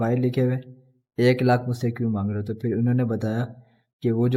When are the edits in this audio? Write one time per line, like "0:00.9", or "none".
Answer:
none